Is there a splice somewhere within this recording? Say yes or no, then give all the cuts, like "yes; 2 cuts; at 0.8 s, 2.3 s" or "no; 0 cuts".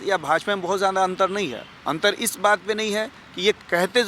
yes; 1 cut; at 1.7 s